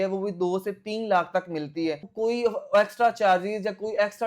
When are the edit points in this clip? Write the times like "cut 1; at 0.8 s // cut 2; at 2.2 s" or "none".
cut 1; at 2.1 s